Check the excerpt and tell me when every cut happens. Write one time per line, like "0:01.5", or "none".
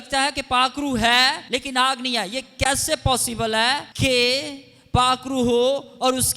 0:01.4
0:03.9